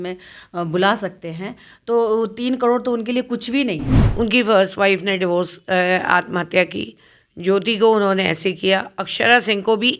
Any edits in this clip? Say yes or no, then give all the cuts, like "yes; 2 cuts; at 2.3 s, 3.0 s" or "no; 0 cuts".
yes; 1 cut; at 4.0 s